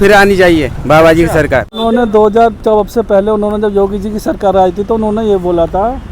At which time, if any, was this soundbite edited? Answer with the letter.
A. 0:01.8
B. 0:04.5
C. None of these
A